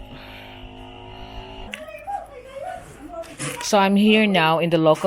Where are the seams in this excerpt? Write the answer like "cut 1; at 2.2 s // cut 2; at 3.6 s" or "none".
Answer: cut 1; at 1.7 s